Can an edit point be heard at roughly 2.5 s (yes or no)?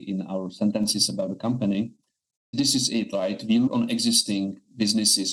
yes